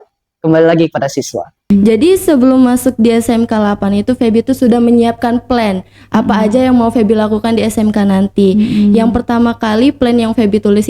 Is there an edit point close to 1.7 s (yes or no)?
yes